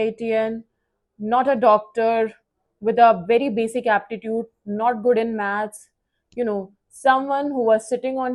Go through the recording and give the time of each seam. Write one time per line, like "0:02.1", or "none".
none